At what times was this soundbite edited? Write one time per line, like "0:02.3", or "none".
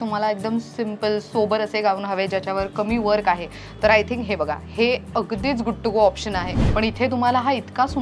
0:06.6